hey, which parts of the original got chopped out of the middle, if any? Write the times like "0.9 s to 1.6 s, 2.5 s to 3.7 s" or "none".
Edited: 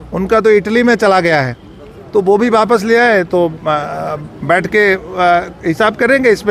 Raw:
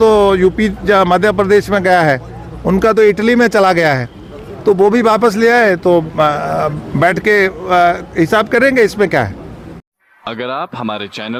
none